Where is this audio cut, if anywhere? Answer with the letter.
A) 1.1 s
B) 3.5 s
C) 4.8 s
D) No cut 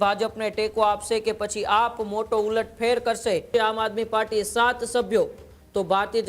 B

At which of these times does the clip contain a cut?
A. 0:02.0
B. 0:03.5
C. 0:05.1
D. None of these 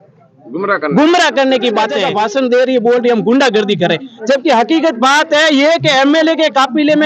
A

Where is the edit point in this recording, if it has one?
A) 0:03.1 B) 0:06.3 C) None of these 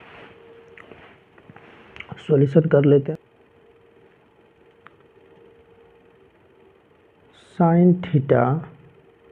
A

